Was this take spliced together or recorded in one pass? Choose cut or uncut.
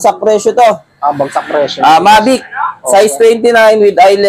uncut